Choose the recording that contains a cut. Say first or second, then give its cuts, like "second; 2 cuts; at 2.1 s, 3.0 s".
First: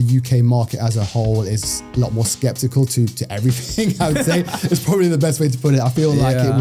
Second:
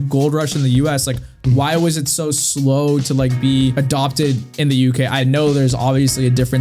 second; 1 cut; at 3.7 s